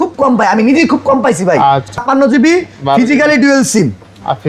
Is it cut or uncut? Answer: cut